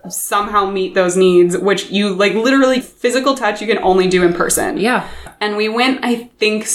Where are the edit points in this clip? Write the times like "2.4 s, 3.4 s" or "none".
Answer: 5.3 s